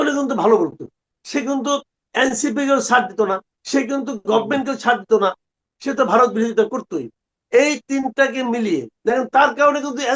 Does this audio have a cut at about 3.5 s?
yes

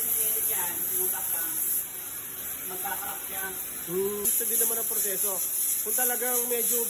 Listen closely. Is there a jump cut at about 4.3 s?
yes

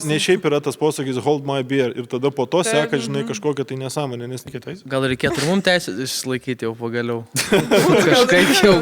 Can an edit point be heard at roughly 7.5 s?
no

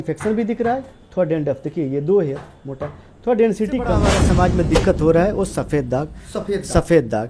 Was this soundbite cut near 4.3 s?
yes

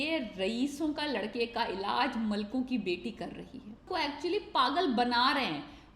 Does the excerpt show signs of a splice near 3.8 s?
yes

